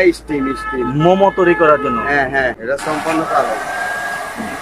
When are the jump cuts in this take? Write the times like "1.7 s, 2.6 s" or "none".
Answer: 2.6 s